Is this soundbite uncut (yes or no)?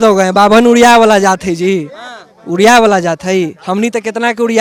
yes